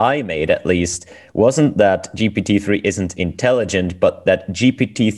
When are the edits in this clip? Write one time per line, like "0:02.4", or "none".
none